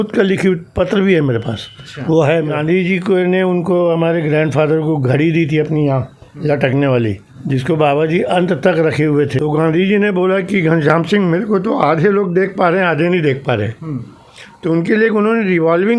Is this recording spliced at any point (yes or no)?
yes